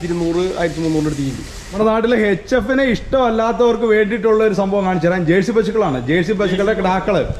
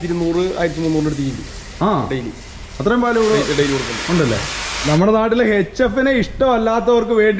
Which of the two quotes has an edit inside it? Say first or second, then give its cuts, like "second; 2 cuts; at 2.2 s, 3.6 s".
first; 1 cut; at 1.8 s